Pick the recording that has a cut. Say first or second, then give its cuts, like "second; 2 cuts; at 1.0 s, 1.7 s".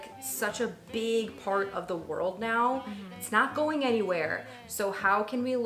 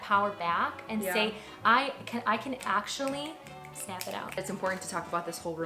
second; 1 cut; at 4.4 s